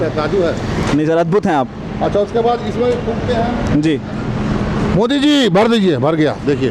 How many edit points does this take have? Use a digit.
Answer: 0